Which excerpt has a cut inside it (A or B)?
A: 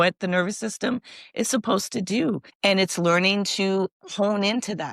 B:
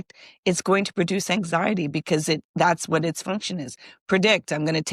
A